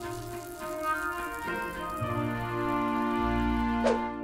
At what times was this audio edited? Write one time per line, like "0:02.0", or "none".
none